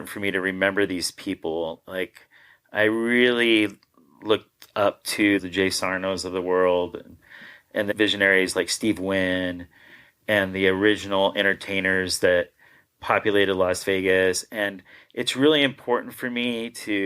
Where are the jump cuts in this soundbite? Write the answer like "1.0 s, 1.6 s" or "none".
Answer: 5.4 s, 7.9 s